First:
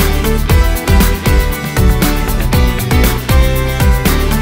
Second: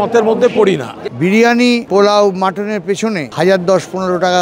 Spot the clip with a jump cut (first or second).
second